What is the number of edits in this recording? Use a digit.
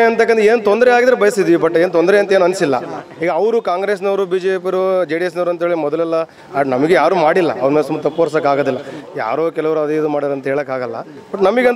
0